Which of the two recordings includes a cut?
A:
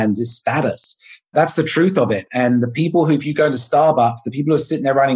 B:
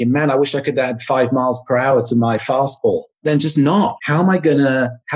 B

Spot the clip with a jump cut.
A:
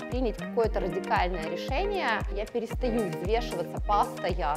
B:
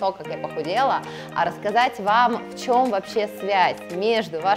A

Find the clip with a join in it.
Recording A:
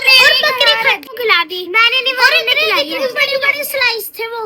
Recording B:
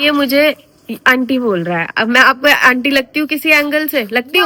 A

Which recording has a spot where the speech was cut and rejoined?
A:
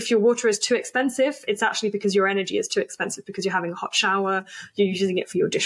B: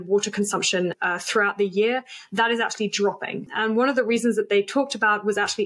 B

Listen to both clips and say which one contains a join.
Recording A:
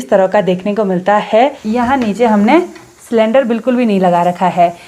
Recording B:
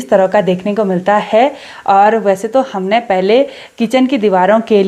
A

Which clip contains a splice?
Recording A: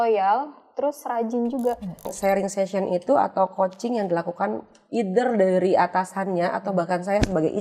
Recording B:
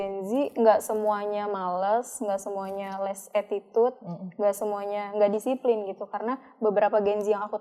A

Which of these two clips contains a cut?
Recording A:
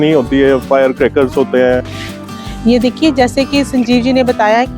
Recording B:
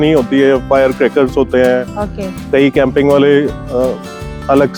A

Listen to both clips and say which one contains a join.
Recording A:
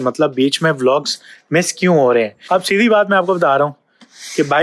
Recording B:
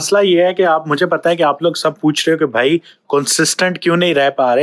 A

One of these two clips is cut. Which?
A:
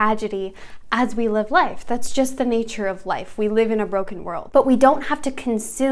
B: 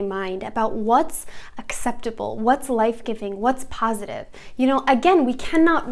A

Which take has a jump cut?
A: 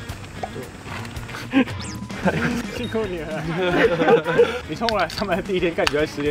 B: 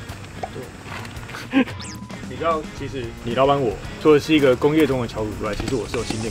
B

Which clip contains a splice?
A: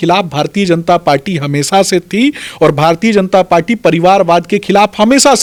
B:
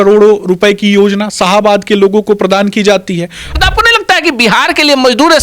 B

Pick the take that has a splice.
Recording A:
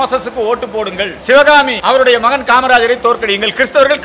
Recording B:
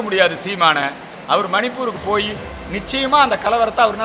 A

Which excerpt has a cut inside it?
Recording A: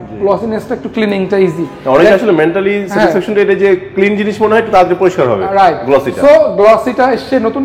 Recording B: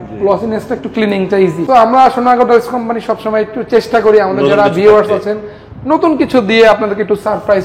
B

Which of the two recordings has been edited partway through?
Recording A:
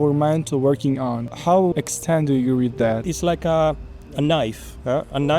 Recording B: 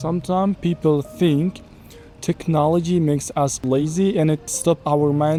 A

